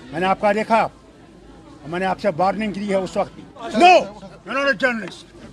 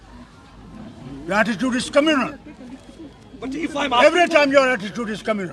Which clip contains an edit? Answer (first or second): first